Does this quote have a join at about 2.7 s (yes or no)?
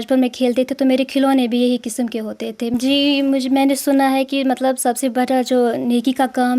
yes